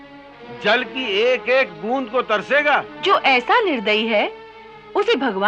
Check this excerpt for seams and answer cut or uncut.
cut